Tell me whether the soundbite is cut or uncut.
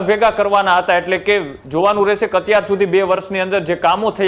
cut